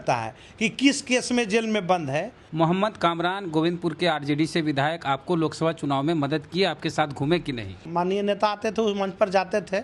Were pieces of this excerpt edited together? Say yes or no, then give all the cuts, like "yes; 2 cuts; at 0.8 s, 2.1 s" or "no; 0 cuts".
yes; 2 cuts; at 2.4 s, 7.8 s